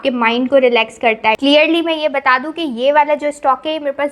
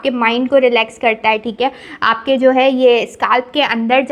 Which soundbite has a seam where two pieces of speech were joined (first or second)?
first